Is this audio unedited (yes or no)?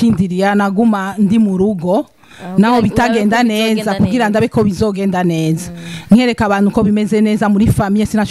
yes